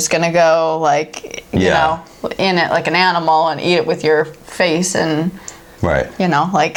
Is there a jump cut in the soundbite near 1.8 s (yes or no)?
no